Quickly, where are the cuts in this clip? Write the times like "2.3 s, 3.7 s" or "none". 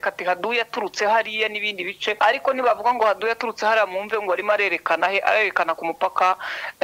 2.2 s